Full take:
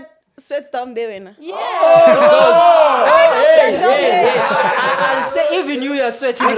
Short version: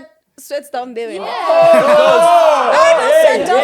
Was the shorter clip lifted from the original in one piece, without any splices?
no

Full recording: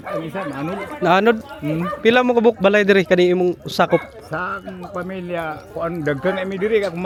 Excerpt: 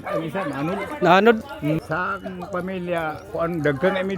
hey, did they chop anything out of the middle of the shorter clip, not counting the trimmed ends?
yes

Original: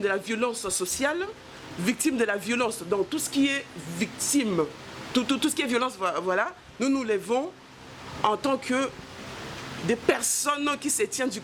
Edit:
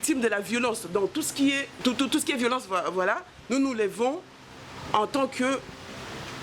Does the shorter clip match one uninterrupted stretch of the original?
no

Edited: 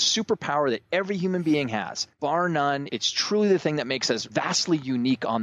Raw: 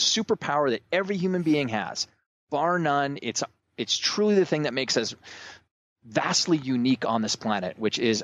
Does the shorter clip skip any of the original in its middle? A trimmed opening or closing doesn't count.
yes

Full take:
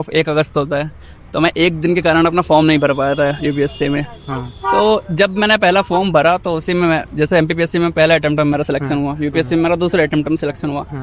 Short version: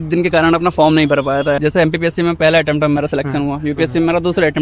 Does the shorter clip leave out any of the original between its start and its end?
yes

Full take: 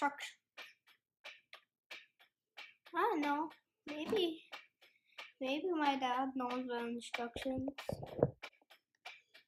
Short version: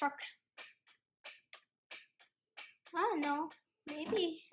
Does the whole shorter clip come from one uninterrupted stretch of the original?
yes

